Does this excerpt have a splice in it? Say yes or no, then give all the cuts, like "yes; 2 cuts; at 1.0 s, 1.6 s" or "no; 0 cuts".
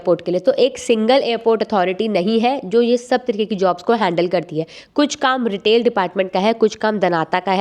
no; 0 cuts